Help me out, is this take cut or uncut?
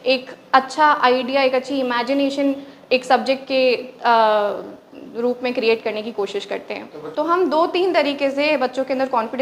cut